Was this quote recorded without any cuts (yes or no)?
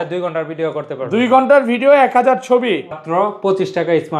no